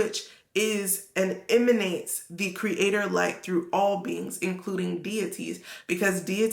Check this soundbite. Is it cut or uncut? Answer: uncut